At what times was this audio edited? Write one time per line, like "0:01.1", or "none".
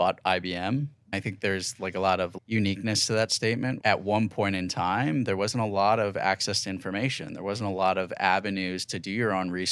0:01.1
0:02.3
0:03.8